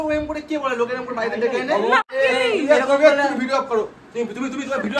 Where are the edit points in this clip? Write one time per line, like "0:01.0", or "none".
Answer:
0:02.1